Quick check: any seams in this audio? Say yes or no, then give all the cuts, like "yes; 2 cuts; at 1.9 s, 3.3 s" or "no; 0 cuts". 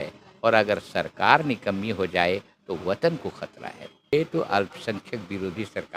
yes; 1 cut; at 4.1 s